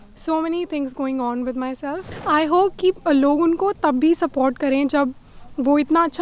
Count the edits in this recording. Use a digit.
1